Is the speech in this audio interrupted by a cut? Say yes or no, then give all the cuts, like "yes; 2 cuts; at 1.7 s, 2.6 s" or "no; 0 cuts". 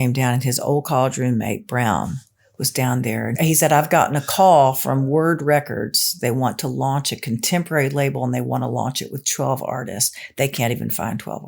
yes; 2 cuts; at 3.3 s, 6.1 s